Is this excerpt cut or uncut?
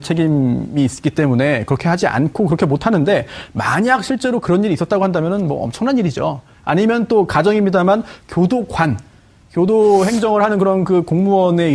uncut